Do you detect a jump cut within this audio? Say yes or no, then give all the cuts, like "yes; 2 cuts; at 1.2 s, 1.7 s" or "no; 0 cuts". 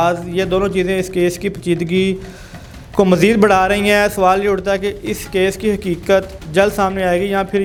no; 0 cuts